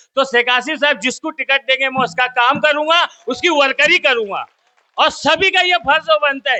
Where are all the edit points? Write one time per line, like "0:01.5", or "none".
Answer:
none